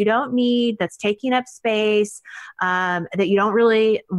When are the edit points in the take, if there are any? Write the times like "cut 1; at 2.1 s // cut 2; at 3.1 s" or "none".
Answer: none

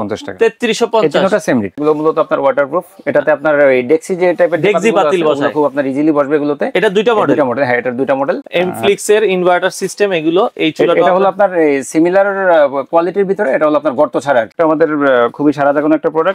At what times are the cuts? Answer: cut 1; at 1.8 s // cut 2; at 8.4 s // cut 3; at 14.5 s

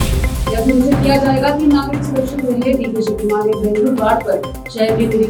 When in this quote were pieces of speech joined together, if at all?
none

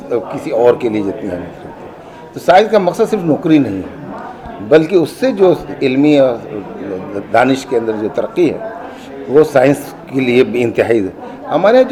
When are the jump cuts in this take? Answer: none

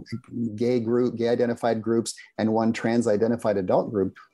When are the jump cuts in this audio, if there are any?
none

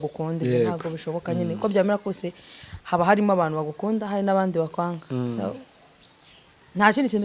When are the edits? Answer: none

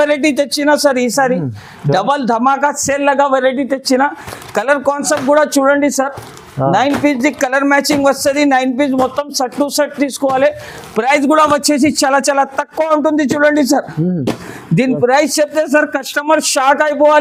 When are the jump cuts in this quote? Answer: none

